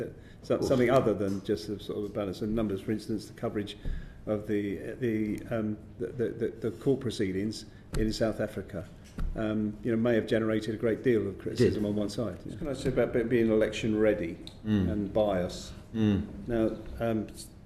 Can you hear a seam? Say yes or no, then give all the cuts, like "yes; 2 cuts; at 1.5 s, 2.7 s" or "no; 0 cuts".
yes; 1 cut; at 12.7 s